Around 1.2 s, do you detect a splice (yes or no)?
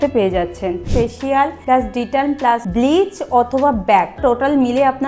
yes